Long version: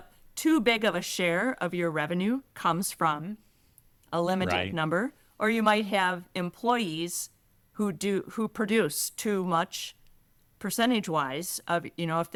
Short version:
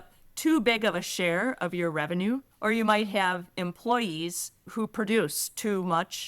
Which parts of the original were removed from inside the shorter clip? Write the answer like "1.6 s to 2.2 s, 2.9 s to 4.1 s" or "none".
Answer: 2.5 s to 5.3 s, 7.5 s to 8.3 s

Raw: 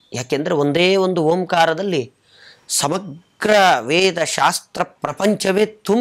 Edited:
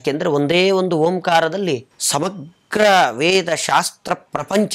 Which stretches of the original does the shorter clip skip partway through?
2.2 s to 2.6 s

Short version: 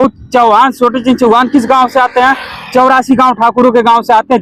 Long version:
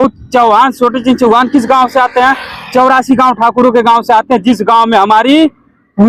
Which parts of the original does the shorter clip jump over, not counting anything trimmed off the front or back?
none

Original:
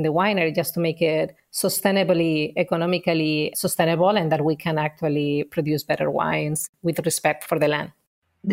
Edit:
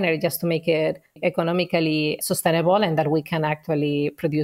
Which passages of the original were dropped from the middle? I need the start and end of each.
1.5 s to 2.5 s

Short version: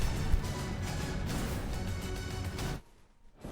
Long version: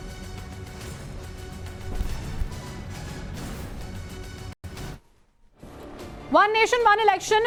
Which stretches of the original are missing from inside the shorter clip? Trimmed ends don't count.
4.5 s to 4.6 s

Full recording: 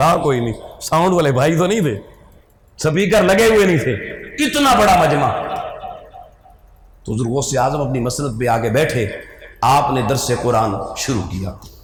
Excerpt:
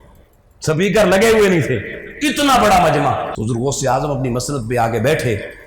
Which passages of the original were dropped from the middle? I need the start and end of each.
5.5 s to 7.0 s

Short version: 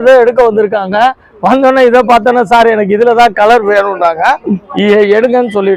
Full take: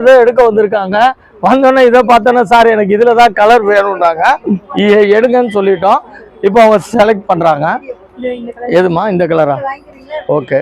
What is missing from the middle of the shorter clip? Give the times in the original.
none

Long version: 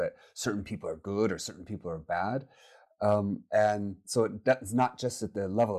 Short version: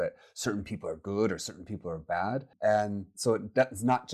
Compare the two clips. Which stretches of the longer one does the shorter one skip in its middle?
2.5 s to 3.4 s

